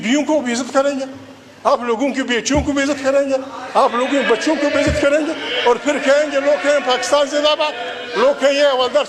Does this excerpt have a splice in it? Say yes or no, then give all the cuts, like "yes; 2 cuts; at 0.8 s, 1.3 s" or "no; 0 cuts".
no; 0 cuts